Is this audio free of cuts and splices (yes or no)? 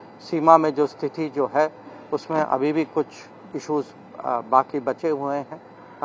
yes